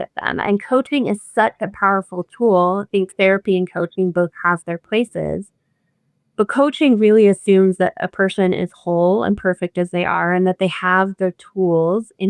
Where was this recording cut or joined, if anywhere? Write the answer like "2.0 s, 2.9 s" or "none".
none